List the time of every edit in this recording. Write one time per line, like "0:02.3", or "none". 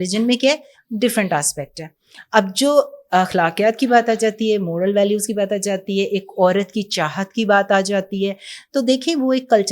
none